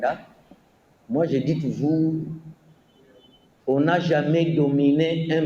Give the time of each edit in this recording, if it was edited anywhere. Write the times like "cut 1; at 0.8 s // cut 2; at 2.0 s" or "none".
none